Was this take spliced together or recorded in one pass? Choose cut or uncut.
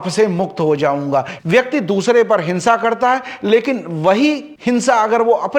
cut